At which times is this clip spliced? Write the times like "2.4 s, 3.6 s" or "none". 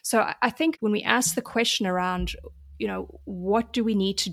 0.9 s